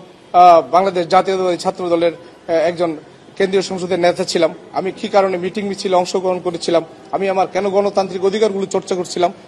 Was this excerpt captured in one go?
yes; 0 cuts

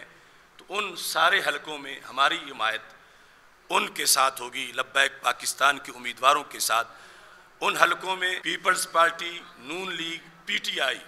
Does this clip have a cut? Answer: yes; 1 cut; at 8.4 s

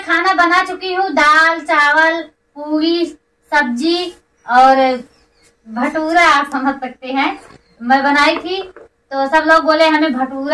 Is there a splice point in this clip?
no; 0 cuts

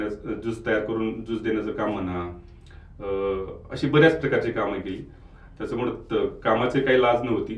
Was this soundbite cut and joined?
no; 0 cuts

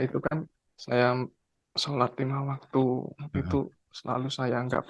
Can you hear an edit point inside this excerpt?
no; 0 cuts

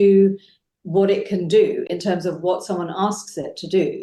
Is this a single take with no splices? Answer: yes; 0 cuts

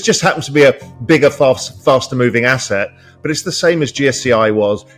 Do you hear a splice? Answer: no; 0 cuts

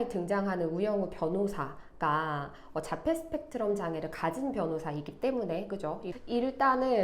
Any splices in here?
yes; 1 cut; at 6.0 s

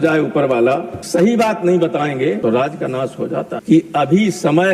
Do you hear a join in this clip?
yes; 1 cut; at 3.6 s

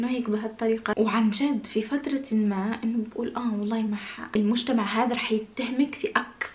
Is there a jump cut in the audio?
yes; 1 cut; at 4.1 s

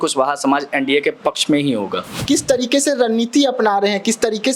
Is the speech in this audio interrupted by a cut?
yes; 1 cut; at 2.1 s

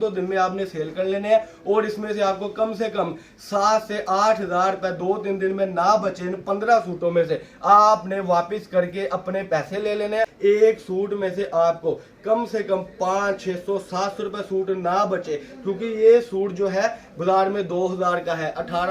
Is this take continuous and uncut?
no; 1 cut; at 10.3 s

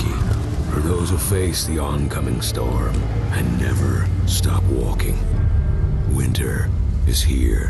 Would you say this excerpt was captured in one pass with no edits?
yes; 0 cuts

